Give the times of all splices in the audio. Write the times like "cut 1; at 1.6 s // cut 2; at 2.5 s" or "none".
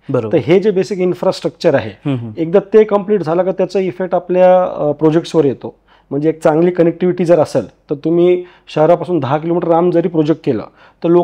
none